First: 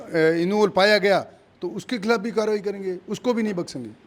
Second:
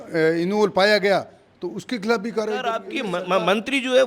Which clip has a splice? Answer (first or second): second